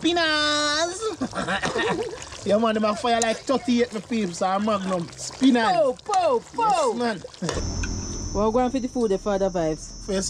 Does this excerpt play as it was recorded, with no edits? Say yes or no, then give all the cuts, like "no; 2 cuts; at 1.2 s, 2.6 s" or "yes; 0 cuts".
no; 1 cut; at 7.6 s